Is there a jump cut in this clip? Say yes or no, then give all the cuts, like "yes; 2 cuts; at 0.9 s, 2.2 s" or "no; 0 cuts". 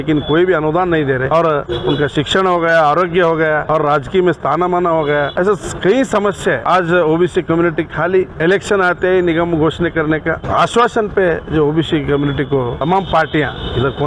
yes; 7 cuts; at 1.3 s, 3.6 s, 5.3 s, 6.6 s, 8.3 s, 10.4 s, 12.8 s